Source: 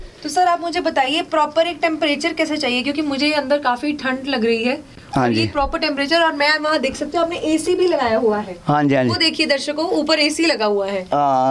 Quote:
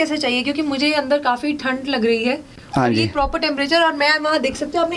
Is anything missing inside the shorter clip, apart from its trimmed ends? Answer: no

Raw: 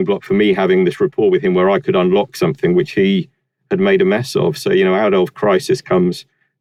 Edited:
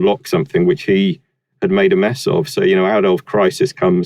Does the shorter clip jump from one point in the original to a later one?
no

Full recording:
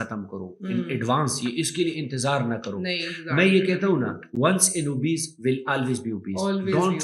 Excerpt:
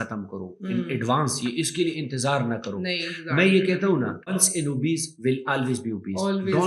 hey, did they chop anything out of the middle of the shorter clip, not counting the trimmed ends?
yes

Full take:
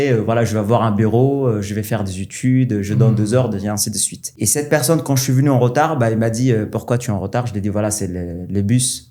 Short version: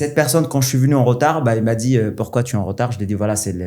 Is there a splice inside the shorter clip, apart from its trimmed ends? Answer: no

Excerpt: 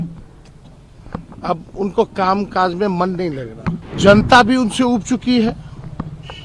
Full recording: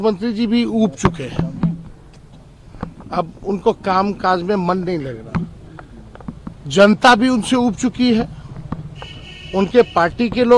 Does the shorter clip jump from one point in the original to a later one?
yes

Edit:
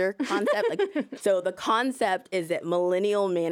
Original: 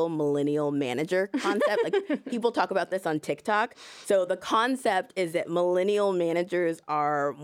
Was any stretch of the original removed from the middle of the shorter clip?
yes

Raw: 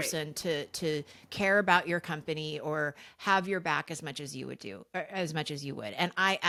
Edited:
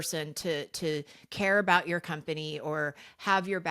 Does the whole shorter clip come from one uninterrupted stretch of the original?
yes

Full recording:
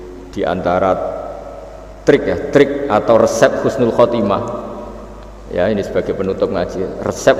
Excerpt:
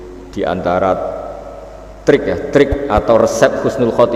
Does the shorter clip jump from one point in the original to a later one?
no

